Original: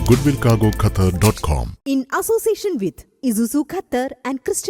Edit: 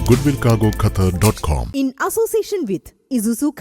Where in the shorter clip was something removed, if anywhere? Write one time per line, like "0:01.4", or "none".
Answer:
0:01.6